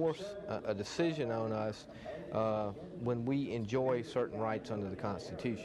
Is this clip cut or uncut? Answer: uncut